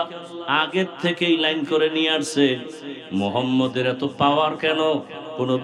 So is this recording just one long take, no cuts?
yes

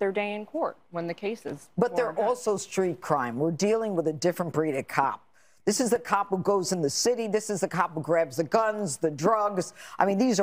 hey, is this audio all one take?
yes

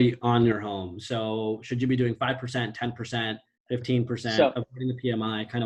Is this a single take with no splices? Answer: yes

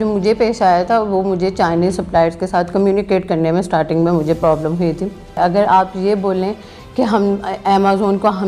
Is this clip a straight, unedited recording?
no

